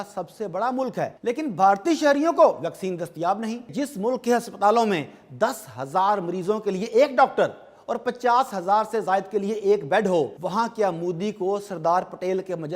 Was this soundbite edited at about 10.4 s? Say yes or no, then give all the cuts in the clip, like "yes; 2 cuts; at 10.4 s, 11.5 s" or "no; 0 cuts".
yes; 3 cuts; at 1.2 s, 3.7 s, 10.4 s